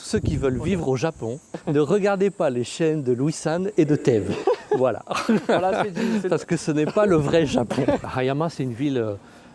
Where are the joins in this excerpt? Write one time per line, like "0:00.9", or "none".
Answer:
0:01.5
0:08.0